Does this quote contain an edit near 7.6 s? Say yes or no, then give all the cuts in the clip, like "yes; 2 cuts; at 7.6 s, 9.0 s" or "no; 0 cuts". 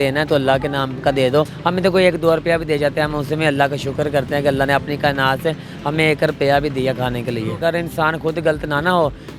yes; 2 cuts; at 1.5 s, 7.6 s